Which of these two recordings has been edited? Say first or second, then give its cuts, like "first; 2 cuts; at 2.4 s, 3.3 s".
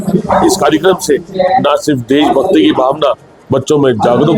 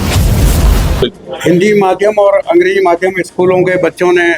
second; 1 cut; at 0.9 s